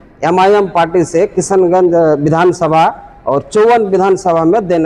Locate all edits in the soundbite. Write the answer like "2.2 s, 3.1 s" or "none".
none